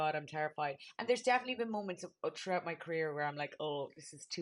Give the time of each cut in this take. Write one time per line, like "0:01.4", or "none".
none